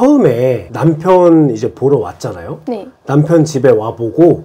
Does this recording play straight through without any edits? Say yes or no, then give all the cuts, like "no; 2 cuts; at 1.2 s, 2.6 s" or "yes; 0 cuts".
yes; 0 cuts